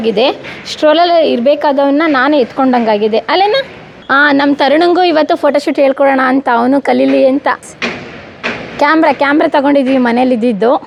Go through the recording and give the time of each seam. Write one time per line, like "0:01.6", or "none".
none